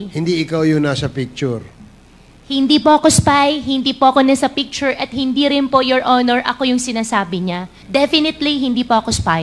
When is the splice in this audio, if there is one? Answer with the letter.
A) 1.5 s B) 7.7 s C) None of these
B